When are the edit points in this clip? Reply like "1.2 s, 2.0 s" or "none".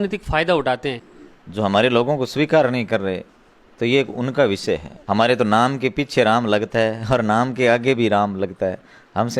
1.0 s, 4.9 s

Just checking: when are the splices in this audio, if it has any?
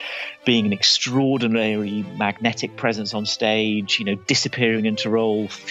none

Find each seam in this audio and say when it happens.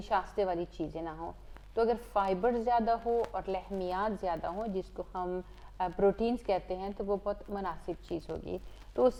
none

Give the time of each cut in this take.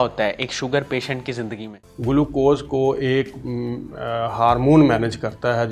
1.5 s

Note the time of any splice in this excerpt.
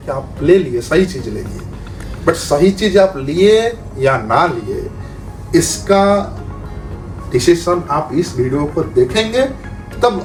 none

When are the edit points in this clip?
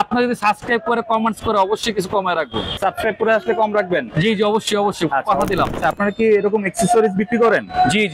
2.8 s, 5.8 s

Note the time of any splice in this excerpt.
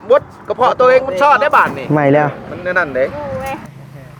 1.8 s, 2.4 s, 3.1 s

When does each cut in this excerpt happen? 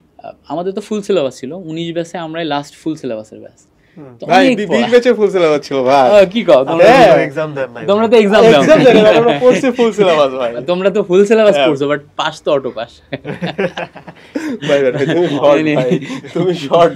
none

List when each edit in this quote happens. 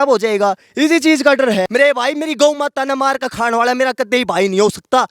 1.7 s

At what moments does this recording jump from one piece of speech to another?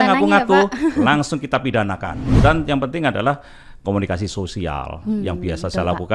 2.2 s

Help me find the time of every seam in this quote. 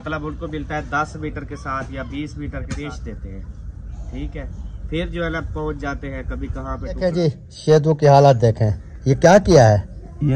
2.8 s, 6.9 s

